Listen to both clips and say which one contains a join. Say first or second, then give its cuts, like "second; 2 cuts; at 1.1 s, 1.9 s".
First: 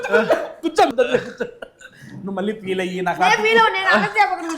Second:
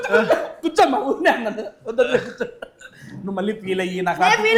first; 1 cut; at 0.9 s